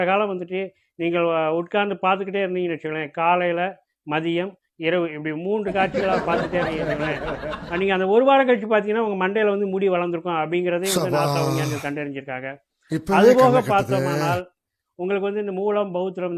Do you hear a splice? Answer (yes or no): no